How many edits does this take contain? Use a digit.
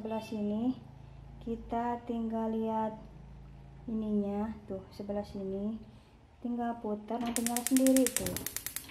0